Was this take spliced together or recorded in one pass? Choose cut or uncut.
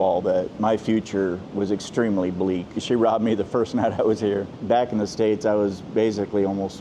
cut